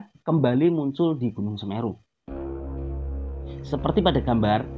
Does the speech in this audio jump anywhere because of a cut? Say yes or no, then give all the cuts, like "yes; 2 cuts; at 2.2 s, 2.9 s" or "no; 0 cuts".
no; 0 cuts